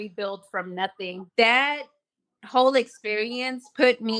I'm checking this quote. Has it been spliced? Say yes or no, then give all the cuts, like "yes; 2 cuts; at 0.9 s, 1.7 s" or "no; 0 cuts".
yes; 1 cut; at 1.1 s